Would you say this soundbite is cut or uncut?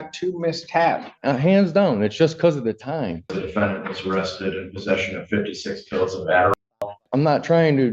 cut